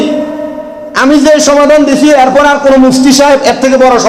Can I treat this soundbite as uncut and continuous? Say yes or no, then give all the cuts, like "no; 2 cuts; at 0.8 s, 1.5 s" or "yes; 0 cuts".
yes; 0 cuts